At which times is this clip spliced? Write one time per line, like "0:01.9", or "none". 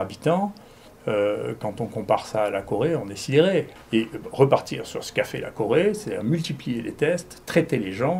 0:03.8

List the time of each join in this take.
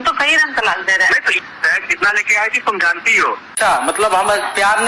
0:01.4
0:03.5

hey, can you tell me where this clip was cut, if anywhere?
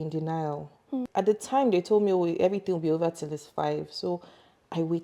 0:01.0

